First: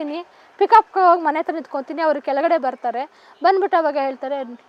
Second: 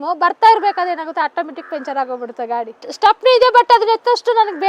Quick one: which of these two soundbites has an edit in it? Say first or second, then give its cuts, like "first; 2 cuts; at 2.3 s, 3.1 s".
second; 1 cut; at 2.8 s